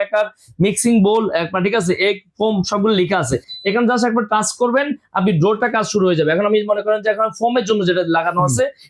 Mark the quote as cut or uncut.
uncut